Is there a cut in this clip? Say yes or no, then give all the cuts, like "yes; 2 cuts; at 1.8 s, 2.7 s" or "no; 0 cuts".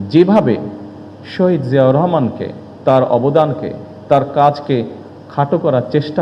no; 0 cuts